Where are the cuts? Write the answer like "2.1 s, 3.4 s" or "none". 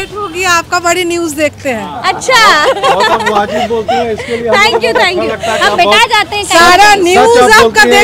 none